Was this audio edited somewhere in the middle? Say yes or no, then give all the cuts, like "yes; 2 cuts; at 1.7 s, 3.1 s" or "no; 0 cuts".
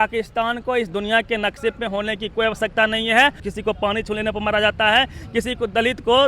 yes; 1 cut; at 3.5 s